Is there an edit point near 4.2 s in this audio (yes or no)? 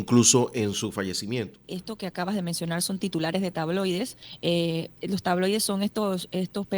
yes